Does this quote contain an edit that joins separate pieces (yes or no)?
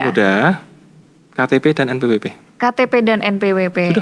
no